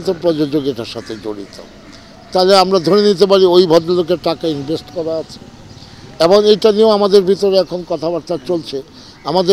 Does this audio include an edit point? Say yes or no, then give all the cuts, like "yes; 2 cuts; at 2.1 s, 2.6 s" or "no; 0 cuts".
no; 0 cuts